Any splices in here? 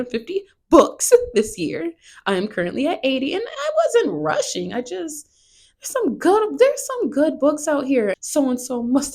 yes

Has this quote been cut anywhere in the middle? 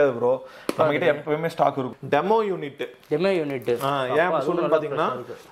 yes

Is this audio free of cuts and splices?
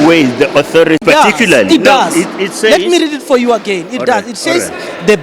no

